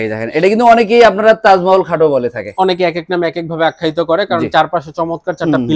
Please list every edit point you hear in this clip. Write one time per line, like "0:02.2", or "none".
none